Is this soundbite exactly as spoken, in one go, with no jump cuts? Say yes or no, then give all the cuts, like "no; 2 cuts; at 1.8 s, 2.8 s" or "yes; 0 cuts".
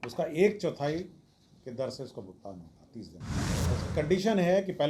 no; 1 cut; at 3.6 s